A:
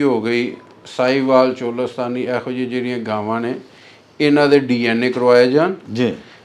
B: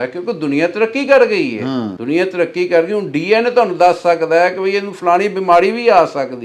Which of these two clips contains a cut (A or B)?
B